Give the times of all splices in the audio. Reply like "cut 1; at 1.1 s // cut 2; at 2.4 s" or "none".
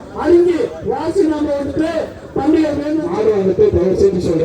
cut 1; at 3.0 s